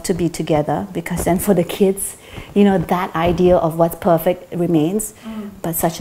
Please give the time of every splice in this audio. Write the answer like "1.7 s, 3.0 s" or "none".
none